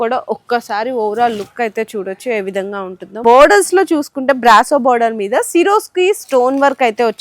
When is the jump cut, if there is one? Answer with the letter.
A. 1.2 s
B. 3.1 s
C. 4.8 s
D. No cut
B